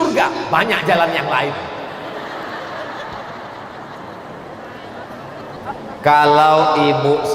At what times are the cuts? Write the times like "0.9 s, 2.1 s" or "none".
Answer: 5.6 s